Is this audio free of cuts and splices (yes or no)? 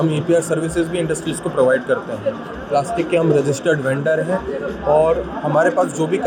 yes